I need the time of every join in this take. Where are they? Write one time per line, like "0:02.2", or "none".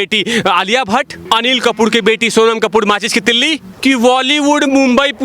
0:01.2
0:03.7